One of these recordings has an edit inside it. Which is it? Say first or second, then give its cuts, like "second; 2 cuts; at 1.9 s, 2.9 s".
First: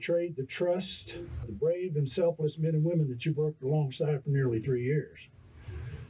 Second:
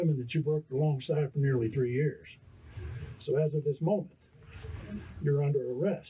first; 1 cut; at 1.5 s